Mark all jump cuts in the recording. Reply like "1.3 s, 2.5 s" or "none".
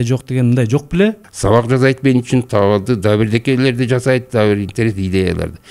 1.2 s